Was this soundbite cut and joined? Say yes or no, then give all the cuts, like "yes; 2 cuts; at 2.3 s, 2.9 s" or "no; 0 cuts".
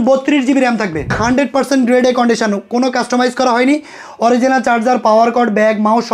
yes; 1 cut; at 1.1 s